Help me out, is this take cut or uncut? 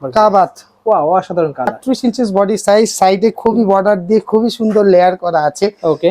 cut